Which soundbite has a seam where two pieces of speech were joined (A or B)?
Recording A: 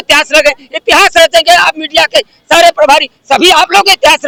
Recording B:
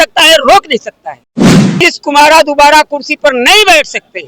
B